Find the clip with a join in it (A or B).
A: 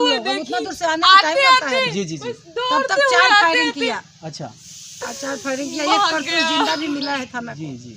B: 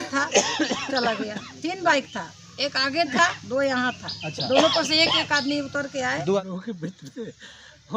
B